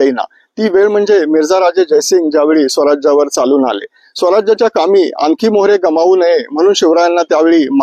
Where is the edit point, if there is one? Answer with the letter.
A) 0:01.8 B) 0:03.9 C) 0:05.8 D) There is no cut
D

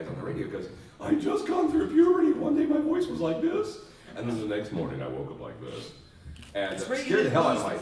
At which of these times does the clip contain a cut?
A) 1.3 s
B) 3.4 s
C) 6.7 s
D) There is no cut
C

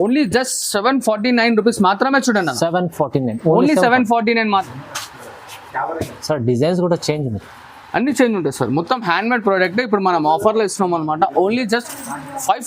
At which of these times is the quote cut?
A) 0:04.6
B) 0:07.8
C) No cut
A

